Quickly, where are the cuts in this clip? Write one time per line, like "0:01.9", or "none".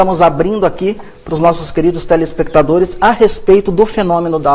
0:01.1